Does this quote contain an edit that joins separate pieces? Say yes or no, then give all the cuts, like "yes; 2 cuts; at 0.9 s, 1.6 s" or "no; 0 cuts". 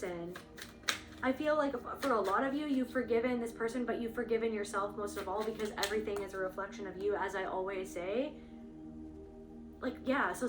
yes; 2 cuts; at 8.3 s, 9.8 s